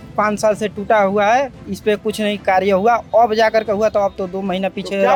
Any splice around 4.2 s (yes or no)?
no